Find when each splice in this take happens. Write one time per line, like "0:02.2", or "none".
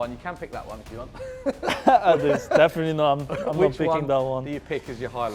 none